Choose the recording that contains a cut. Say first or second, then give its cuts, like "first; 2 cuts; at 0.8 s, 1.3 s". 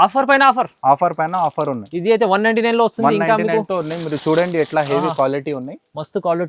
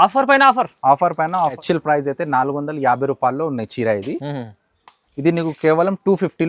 second; 1 cut; at 1.6 s